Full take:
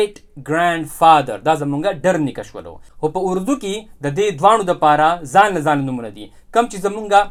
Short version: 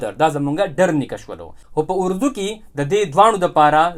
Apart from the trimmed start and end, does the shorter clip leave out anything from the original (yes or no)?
no